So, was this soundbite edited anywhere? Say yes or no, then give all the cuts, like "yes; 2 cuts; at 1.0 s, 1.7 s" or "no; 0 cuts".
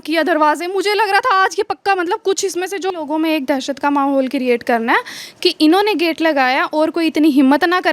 yes; 1 cut; at 2.9 s